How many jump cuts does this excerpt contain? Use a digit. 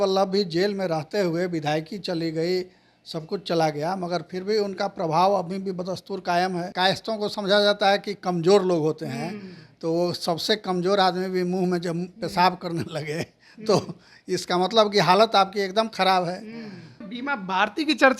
2